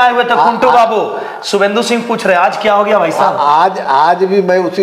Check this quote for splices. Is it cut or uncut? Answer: uncut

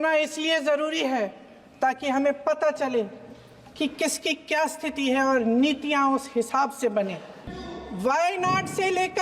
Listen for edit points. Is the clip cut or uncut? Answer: cut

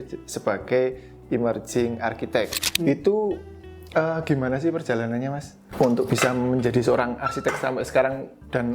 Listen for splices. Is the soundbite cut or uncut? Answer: cut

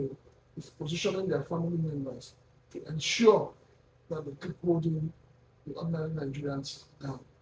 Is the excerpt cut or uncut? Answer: uncut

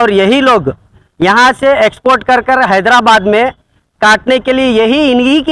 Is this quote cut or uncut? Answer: uncut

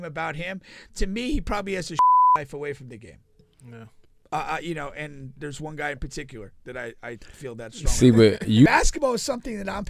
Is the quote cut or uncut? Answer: cut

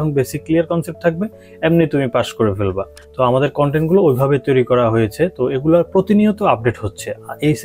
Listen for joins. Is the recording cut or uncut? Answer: uncut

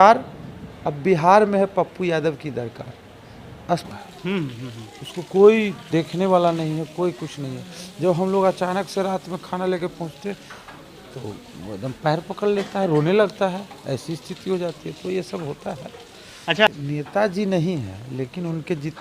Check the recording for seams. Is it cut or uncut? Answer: cut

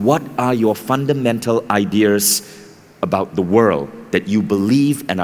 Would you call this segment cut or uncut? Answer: uncut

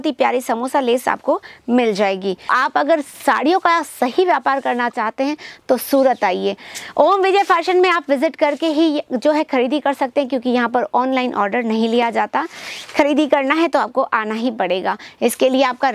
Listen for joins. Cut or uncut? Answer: cut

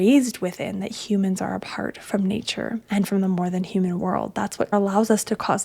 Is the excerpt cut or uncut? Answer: cut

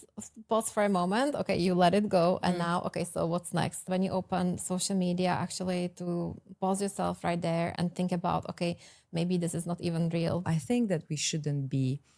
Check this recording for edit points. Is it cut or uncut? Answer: cut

